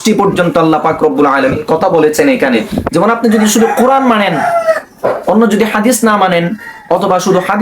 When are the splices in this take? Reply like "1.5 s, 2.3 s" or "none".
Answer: 2.8 s